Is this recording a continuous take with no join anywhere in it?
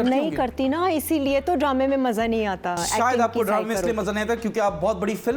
no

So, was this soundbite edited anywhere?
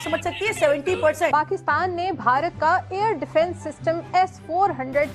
no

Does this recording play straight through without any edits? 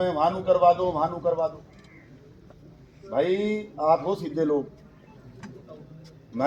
yes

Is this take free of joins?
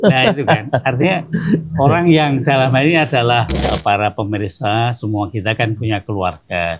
no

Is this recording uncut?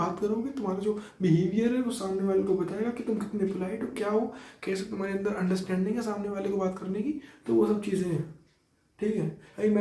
yes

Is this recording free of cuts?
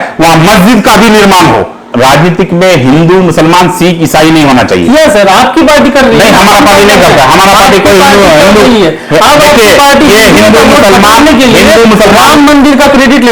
no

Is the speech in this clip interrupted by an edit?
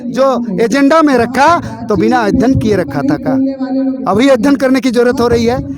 no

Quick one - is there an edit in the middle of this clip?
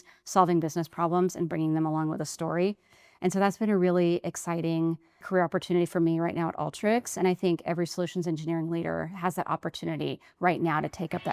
yes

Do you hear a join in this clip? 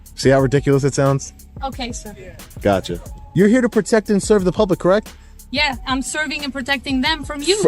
yes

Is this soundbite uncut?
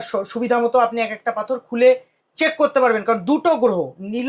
yes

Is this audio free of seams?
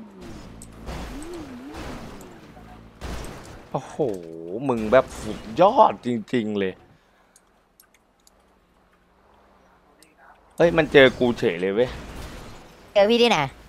yes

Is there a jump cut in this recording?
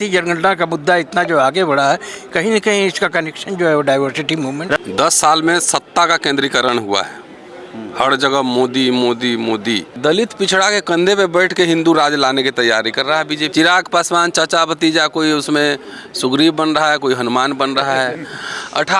yes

